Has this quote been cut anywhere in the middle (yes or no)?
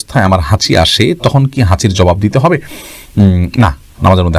no